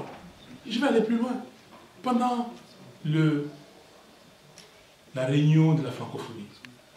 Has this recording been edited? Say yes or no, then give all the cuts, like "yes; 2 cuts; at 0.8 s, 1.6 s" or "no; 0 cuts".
no; 0 cuts